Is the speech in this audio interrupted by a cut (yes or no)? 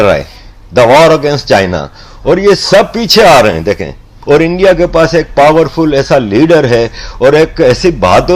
yes